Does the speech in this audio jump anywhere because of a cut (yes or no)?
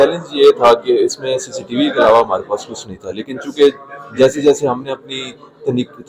no